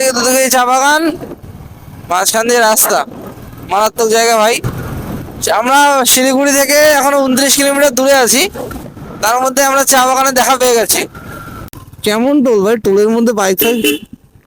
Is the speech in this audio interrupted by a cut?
no; 0 cuts

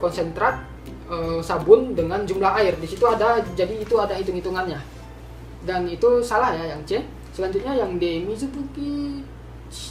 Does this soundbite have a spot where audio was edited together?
no; 0 cuts

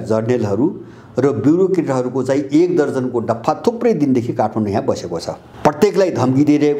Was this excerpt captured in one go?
no; 1 cut; at 5.4 s

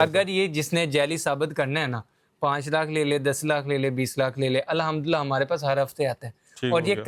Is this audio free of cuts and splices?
yes; 0 cuts

